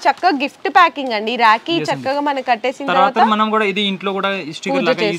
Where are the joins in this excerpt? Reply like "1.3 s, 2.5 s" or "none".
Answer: none